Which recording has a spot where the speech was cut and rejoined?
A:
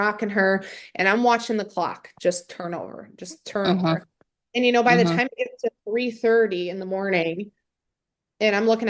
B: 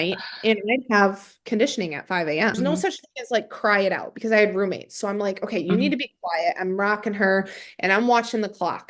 B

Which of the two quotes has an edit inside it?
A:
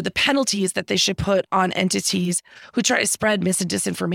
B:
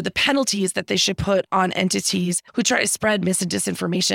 B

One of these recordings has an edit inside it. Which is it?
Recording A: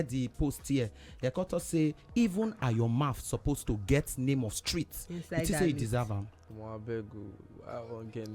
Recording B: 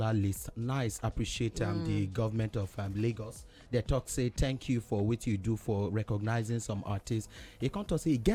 A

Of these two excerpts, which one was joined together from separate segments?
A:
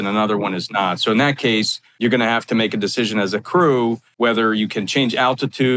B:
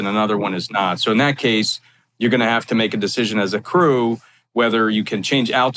A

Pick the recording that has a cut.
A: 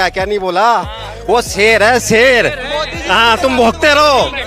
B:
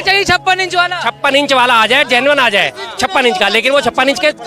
A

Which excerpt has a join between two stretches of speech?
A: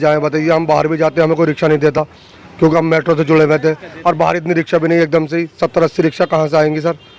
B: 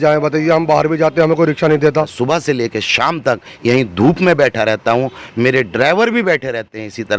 B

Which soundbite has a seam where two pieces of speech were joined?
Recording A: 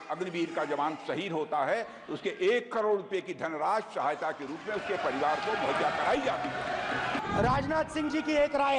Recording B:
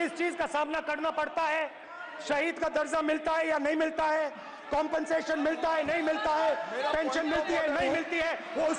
A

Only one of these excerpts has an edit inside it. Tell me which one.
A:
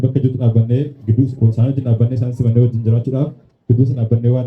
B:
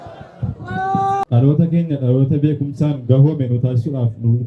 B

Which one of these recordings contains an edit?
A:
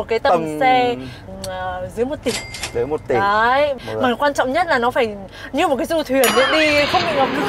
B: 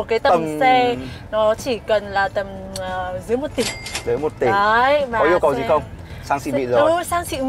A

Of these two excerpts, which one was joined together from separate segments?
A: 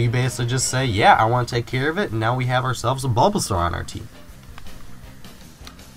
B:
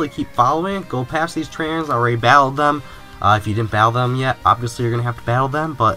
A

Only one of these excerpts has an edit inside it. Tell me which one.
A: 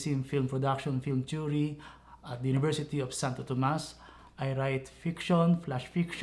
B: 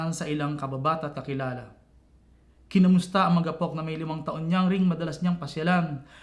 A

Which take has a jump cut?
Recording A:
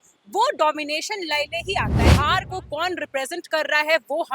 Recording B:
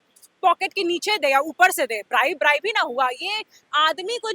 A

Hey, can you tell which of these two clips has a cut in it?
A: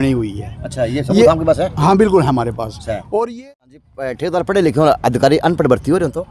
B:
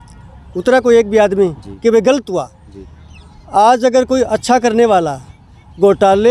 A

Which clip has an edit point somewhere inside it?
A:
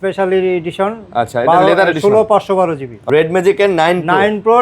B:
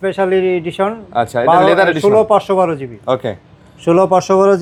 A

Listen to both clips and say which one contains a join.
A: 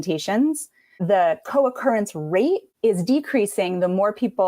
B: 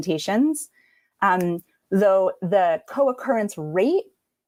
A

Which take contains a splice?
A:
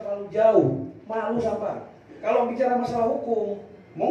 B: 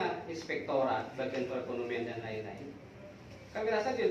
A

